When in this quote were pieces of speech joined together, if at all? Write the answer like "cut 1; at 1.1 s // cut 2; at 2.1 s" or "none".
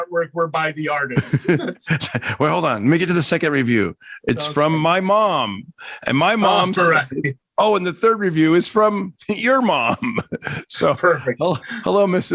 none